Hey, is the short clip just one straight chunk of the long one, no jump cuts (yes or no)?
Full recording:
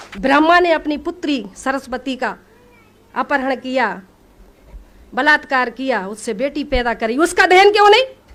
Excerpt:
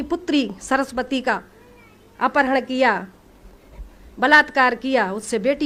yes